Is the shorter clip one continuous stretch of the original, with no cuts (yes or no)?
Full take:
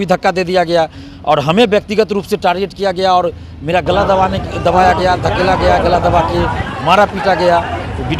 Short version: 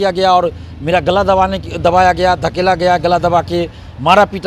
yes